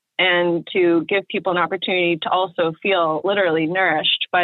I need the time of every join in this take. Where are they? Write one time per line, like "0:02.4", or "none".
none